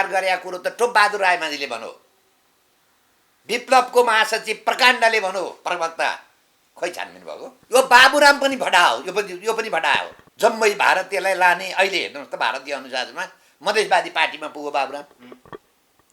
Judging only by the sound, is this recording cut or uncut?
cut